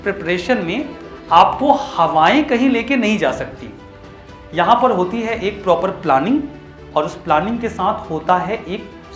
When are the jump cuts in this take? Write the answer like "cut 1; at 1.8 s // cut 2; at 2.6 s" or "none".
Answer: none